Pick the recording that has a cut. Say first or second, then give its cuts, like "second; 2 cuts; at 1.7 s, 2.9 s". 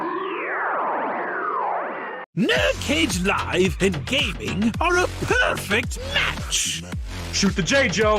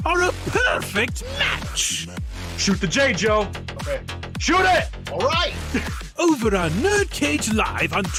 first; 1 cut; at 2.2 s